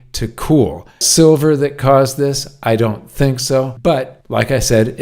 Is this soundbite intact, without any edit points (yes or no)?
no